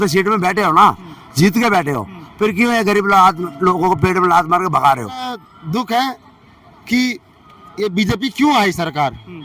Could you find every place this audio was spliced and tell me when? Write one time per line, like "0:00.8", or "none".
0:05.5